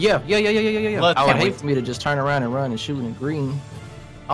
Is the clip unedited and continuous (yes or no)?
no